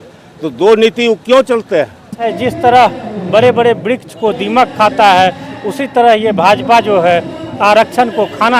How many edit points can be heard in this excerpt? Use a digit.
1